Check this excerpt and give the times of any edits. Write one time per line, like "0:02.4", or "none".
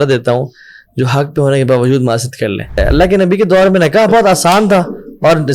0:02.8